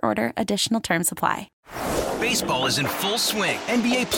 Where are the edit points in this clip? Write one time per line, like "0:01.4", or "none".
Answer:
0:01.5